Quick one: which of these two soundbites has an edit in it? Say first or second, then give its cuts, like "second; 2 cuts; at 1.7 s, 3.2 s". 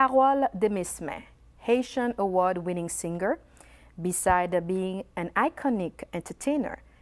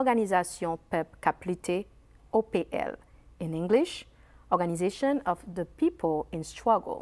first; 1 cut; at 5.6 s